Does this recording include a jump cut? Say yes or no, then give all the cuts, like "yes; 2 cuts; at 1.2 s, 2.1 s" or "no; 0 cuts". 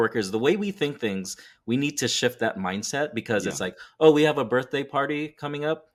no; 0 cuts